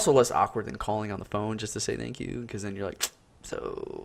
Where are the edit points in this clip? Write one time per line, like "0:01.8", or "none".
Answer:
0:01.5